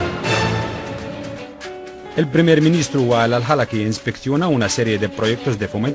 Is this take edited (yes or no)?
yes